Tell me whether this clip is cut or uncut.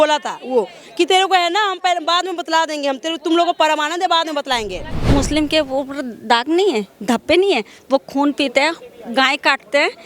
cut